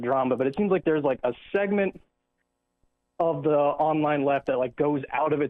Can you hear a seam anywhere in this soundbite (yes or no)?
yes